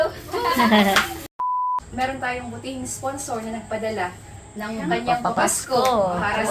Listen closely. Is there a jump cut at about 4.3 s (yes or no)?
no